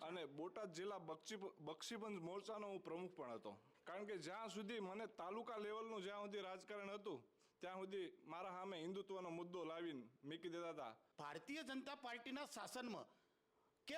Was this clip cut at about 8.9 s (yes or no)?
no